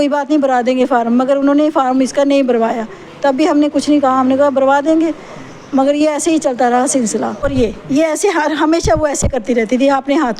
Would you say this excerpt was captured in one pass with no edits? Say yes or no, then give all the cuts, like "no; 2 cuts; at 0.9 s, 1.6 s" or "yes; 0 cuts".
no; 1 cut; at 7.4 s